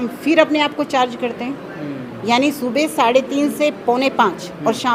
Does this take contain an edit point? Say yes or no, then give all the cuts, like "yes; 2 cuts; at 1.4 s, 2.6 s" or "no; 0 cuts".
no; 0 cuts